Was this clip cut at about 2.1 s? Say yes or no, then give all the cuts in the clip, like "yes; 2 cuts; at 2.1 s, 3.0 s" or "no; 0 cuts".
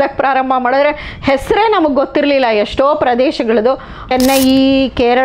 no; 1 cut; at 4.1 s